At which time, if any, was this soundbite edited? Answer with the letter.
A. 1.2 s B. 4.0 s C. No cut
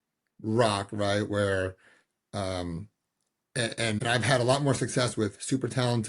B